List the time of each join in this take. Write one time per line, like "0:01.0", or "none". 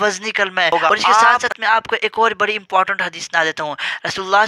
0:01.5